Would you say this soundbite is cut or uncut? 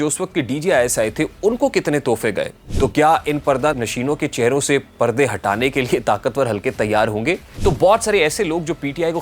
cut